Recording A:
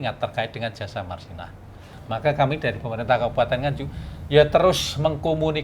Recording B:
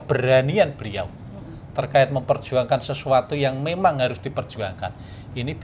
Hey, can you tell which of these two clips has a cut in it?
A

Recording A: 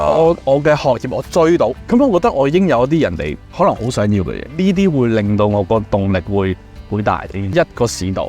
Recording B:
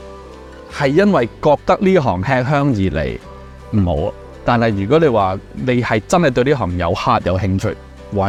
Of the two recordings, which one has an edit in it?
A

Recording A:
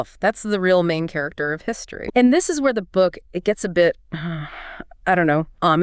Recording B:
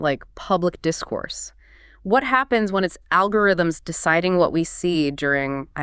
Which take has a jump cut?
A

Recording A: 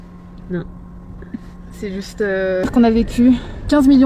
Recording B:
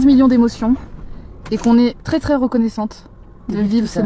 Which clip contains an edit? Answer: A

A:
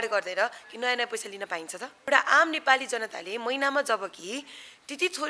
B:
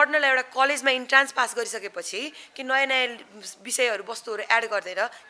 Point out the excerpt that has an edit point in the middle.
A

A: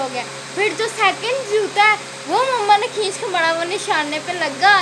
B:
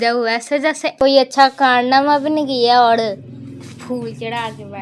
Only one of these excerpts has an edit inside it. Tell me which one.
B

